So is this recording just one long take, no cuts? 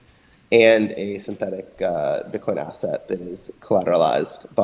yes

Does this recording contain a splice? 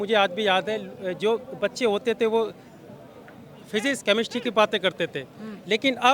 no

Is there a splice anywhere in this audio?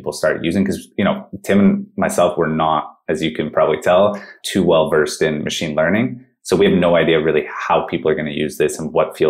no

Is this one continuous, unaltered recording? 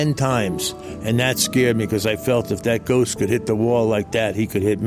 yes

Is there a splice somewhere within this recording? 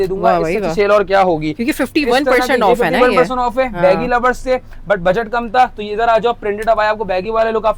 no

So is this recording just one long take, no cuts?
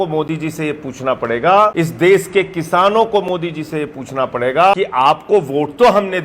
no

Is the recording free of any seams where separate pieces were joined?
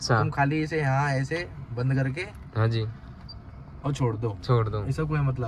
yes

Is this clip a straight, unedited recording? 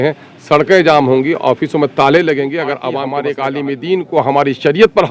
no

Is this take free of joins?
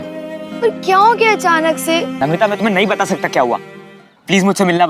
no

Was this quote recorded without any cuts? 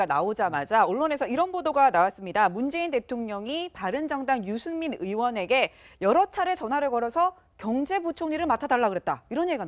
yes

